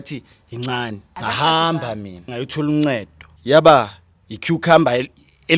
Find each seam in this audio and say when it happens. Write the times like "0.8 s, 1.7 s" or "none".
1.1 s, 2.3 s, 3.3 s